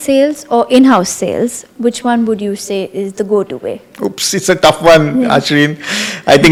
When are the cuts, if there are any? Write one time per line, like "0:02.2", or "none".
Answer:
none